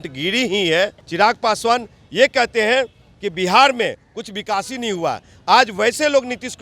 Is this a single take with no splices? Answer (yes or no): no